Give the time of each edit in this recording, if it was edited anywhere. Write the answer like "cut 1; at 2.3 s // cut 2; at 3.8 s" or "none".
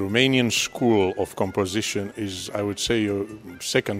none